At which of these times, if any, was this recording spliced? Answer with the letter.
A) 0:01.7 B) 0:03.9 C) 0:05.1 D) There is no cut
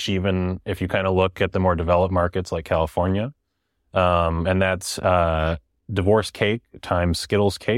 D